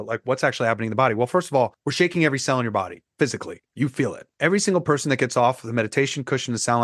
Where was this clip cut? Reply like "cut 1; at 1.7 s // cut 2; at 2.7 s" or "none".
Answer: cut 1; at 1.8 s // cut 2; at 3.0 s // cut 3; at 3.9 s